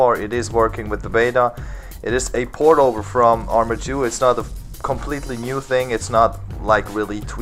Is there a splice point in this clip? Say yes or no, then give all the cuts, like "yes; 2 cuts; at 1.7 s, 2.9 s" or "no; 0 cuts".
no; 0 cuts